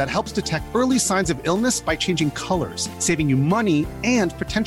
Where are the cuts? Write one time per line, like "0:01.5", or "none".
none